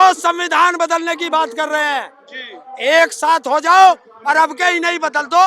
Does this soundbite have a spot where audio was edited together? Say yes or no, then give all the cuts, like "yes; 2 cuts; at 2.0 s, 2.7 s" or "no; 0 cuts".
no; 0 cuts